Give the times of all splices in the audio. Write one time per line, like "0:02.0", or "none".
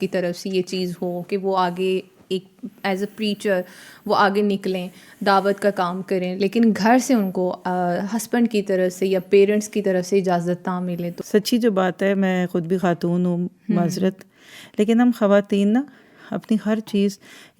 0:11.1